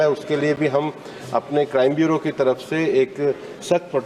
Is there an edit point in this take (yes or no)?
no